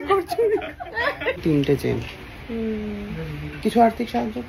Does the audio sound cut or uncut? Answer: cut